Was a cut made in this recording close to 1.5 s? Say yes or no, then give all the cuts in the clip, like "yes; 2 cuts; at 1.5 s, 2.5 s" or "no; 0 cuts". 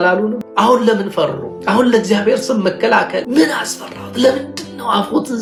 no; 0 cuts